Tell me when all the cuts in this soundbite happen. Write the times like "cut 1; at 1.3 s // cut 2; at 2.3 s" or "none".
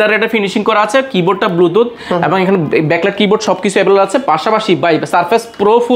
none

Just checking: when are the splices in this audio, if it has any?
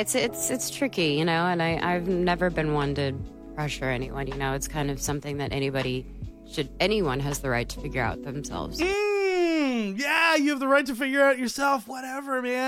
none

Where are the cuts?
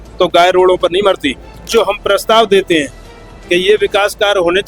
cut 1; at 1.6 s

